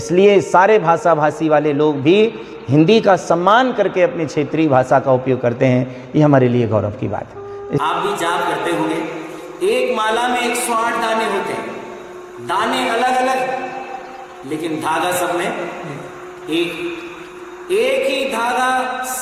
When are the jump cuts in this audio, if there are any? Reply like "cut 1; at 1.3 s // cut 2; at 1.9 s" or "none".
cut 1; at 7.8 s